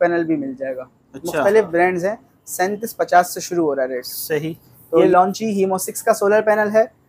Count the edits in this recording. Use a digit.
1